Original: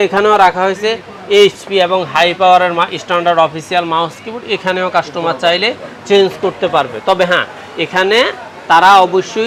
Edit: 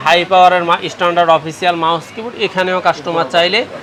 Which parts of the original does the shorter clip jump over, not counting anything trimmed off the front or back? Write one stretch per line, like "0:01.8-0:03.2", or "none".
none